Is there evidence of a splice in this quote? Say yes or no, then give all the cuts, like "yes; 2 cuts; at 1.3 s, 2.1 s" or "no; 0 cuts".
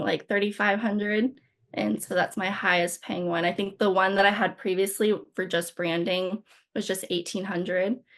no; 0 cuts